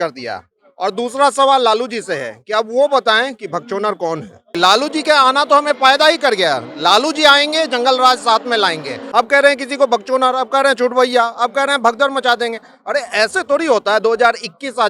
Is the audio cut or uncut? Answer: cut